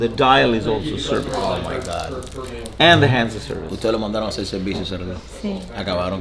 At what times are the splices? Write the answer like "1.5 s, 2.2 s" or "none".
none